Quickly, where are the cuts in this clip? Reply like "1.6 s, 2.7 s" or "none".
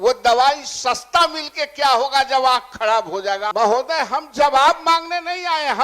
3.5 s